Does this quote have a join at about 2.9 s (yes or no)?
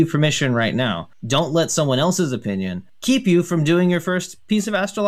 yes